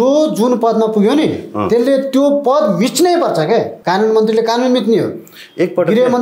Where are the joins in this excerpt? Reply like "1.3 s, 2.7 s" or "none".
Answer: 3.8 s